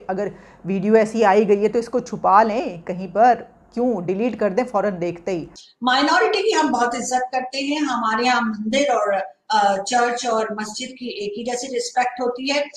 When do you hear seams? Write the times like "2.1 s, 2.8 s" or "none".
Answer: 5.6 s